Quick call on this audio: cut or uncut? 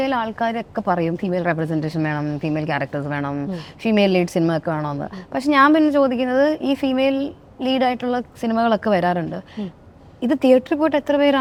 uncut